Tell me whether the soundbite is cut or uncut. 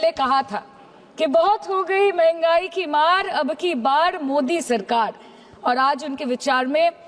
uncut